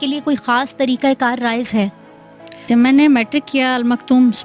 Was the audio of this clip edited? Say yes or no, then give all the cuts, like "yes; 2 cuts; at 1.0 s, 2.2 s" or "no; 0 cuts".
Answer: no; 0 cuts